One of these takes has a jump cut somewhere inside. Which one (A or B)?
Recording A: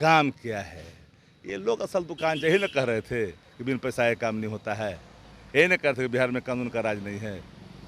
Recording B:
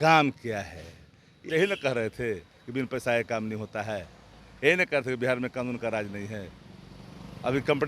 B